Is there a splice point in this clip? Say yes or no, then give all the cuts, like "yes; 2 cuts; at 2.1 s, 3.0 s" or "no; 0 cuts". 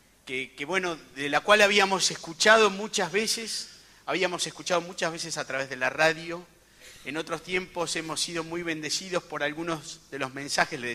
no; 0 cuts